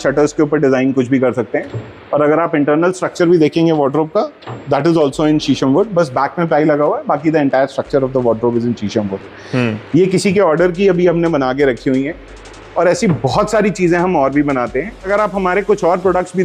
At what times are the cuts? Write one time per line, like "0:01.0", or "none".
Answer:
none